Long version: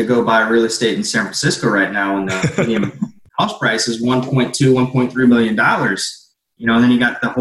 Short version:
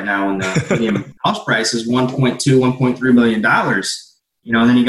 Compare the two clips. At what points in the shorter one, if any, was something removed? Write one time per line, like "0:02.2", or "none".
0:01.1